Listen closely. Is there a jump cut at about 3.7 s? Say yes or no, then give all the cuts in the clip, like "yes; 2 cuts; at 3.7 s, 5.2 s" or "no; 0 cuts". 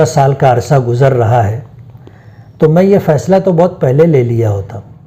no; 0 cuts